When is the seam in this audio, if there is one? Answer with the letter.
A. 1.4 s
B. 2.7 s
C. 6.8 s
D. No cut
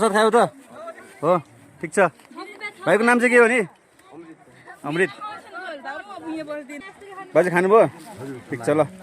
C